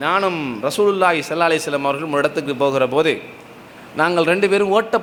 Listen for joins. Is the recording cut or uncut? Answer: uncut